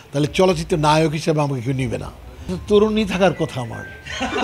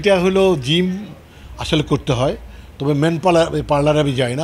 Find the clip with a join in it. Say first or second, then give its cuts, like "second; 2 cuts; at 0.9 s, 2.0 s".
first; 1 cut; at 2.6 s